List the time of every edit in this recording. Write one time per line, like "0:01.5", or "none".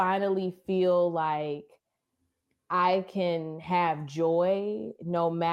none